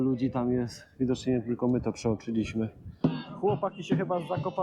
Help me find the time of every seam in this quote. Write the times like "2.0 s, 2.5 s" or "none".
2.9 s